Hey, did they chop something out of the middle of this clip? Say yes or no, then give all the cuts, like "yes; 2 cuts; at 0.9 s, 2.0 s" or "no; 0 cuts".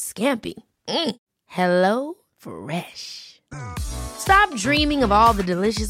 no; 0 cuts